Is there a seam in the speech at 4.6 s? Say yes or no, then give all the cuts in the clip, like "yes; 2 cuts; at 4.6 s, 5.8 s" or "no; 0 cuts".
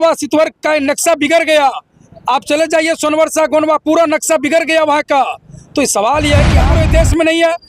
no; 1 cut; at 6.7 s